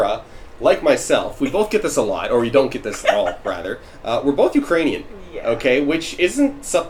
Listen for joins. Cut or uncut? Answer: uncut